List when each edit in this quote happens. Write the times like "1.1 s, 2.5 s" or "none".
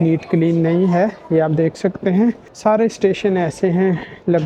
2.5 s